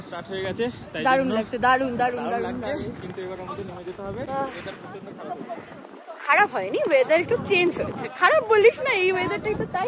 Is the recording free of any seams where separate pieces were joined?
yes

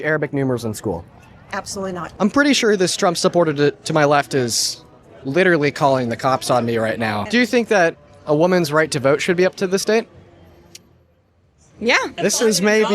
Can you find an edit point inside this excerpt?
yes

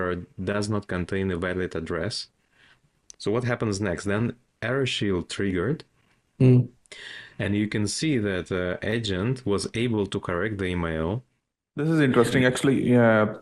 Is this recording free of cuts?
no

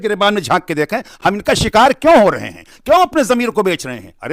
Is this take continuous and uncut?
yes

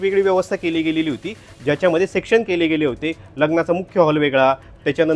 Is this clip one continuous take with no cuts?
yes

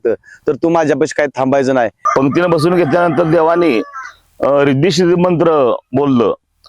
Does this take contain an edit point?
yes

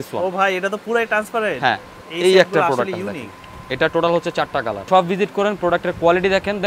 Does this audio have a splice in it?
yes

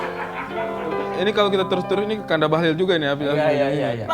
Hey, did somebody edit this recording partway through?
yes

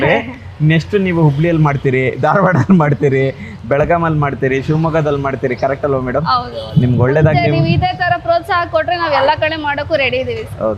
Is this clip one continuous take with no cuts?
yes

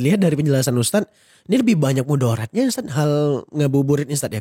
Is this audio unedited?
yes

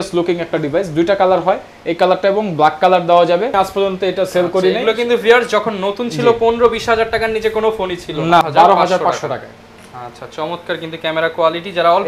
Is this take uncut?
no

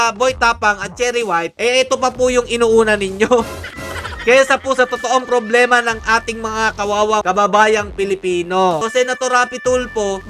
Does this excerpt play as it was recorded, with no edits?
no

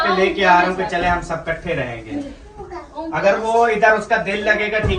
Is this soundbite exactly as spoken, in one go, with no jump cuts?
yes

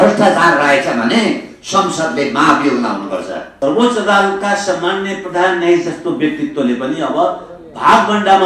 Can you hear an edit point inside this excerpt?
yes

